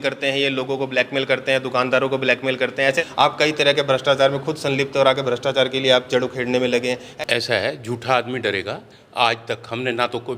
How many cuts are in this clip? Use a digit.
2